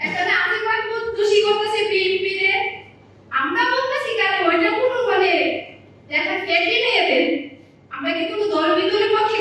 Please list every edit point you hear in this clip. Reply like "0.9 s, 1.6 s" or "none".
none